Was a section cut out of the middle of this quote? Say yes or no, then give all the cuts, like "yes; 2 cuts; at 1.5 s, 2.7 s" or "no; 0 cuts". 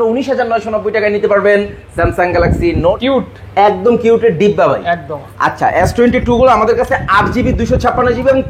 yes; 1 cut; at 3.0 s